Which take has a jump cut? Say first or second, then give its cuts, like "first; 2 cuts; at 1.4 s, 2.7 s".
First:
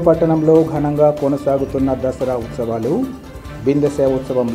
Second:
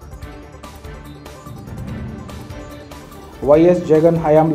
second; 1 cut; at 1.1 s